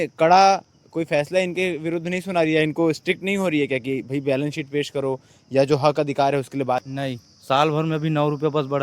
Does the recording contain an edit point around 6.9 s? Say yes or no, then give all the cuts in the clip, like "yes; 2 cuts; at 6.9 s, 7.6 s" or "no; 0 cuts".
yes; 1 cut; at 6.9 s